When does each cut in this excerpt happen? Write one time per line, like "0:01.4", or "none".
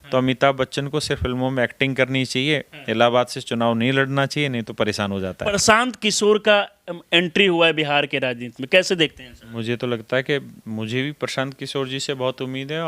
0:05.6
0:09.5